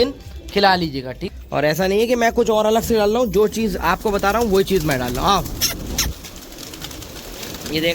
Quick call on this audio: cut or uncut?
cut